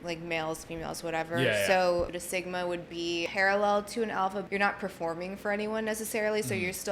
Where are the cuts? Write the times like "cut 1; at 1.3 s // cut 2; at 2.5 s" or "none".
cut 1; at 2.2 s // cut 2; at 3.3 s // cut 3; at 4.5 s